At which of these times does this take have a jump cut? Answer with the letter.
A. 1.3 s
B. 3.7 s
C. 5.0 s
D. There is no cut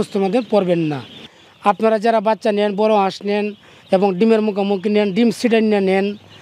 A